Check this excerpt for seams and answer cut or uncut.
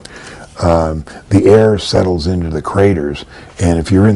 uncut